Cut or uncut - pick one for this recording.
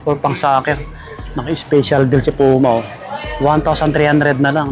uncut